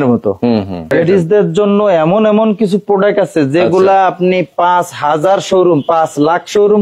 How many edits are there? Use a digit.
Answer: 1